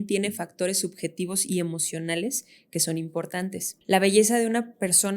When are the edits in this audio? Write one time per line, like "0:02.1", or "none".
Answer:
0:03.7